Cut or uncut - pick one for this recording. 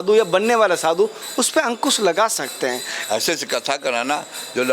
cut